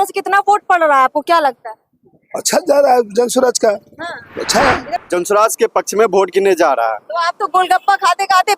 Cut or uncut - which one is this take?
cut